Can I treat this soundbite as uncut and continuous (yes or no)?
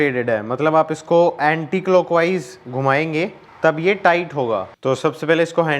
yes